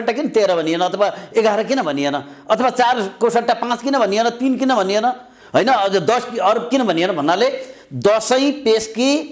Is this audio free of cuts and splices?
yes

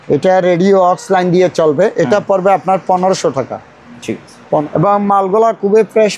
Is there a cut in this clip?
yes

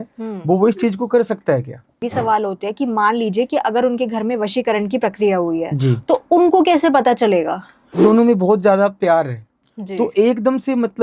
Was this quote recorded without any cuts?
no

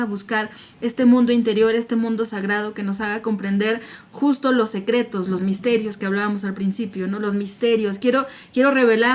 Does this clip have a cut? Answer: no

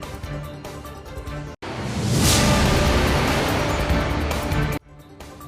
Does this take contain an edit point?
no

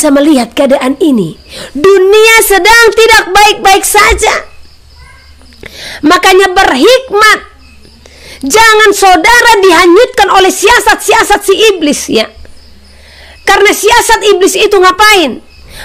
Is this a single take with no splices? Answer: yes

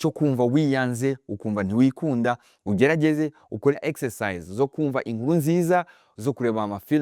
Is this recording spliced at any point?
yes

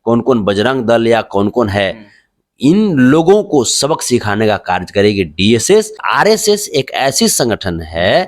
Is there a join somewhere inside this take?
yes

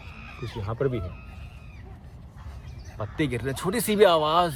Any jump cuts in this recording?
no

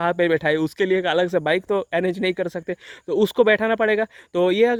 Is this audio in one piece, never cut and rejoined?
yes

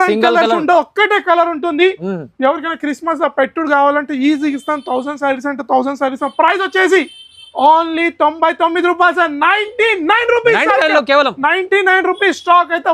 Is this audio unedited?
yes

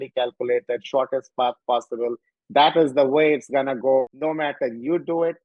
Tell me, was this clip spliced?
yes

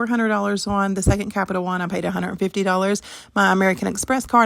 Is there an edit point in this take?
yes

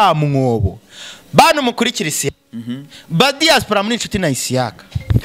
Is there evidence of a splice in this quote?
yes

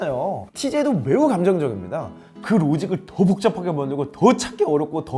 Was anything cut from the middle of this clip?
yes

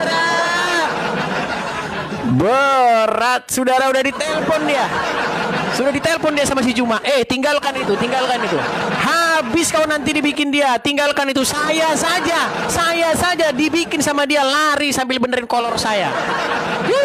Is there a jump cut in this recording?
no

